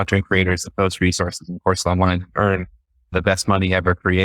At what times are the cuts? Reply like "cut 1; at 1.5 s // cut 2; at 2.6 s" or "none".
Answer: cut 1; at 3.1 s